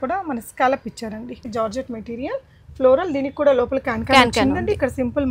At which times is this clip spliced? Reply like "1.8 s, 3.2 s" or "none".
1.4 s

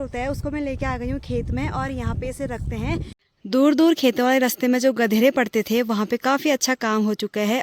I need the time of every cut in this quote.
3.2 s

